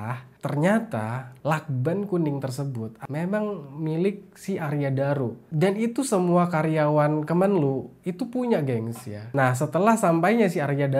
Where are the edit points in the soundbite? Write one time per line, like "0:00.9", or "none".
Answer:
0:09.1